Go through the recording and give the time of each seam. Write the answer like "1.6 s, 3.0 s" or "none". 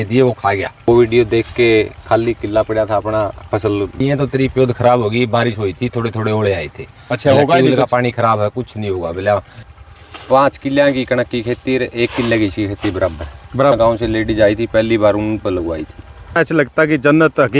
0.9 s, 4.0 s, 9.6 s, 13.7 s, 16.4 s